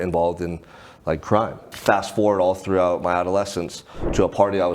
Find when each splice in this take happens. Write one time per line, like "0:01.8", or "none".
0:01.7